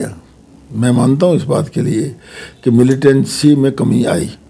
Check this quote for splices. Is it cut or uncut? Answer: uncut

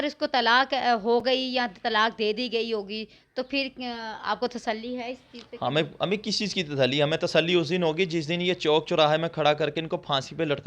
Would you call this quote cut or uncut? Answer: uncut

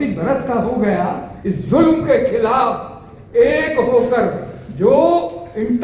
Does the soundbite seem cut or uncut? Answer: cut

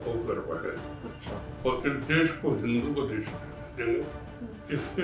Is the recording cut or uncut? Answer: uncut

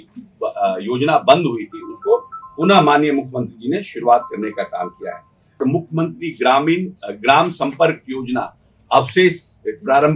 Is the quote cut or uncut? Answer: cut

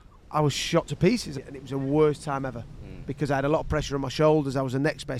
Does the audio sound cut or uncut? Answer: cut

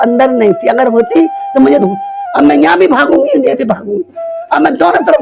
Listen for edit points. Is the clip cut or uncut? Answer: cut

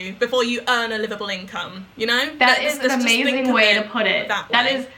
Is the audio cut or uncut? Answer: uncut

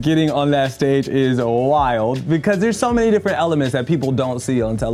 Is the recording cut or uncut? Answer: uncut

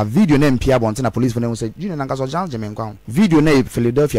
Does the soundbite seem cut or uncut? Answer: cut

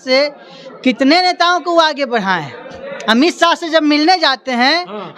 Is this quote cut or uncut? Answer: uncut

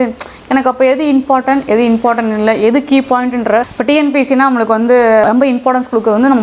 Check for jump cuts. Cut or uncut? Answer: cut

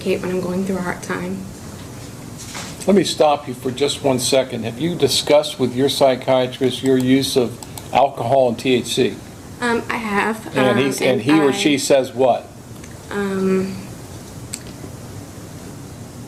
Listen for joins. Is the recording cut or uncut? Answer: uncut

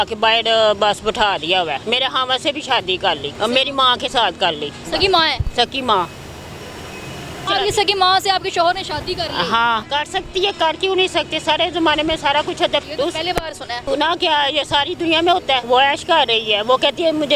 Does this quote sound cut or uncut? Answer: cut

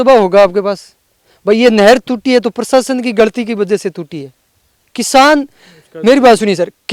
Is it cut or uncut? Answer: uncut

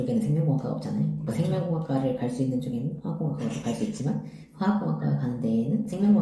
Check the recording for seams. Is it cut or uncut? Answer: uncut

